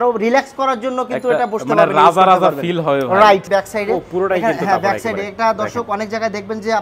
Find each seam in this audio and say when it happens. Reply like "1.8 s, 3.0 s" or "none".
3.5 s